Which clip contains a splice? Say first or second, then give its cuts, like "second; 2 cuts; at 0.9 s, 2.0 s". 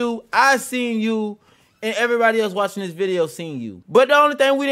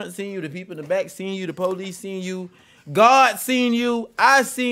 first; 1 cut; at 3.8 s